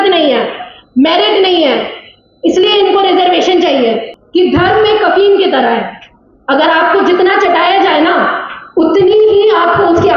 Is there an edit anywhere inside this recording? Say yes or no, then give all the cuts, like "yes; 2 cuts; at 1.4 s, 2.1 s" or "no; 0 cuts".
yes; 1 cut; at 4.1 s